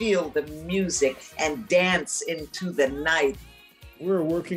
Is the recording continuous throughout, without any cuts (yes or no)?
no